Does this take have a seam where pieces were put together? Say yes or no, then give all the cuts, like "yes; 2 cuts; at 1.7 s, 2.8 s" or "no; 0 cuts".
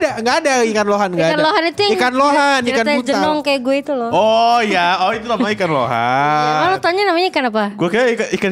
no; 0 cuts